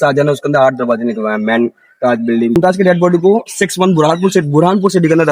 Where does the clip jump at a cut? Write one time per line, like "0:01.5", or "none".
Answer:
0:02.6